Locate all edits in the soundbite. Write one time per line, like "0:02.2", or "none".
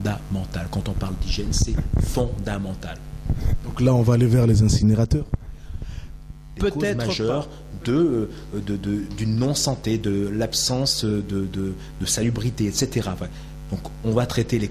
0:07.1